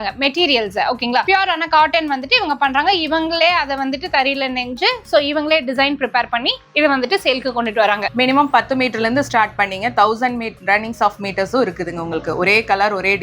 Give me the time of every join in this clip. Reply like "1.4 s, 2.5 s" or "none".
1.2 s, 8.1 s